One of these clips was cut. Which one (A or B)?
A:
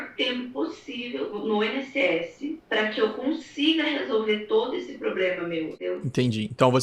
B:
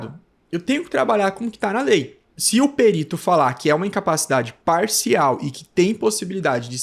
B